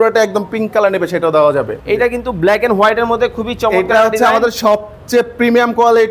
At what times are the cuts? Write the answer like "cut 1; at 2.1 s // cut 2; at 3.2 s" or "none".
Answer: cut 1; at 1.7 s